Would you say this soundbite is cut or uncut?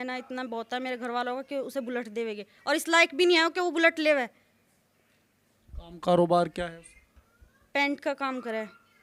uncut